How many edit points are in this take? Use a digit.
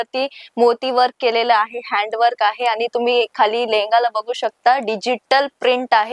0